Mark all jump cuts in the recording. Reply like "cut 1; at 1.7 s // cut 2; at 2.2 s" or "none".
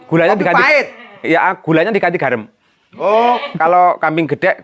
cut 1; at 3.5 s